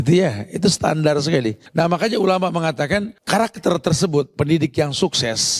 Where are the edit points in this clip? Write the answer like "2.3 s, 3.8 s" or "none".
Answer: 1.6 s, 3.1 s, 4.3 s

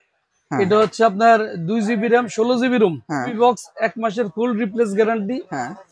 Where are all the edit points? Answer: 3.3 s

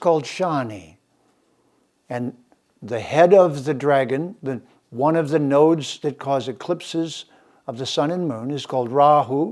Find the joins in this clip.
none

